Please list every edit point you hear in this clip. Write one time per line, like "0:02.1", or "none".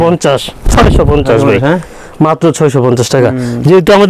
none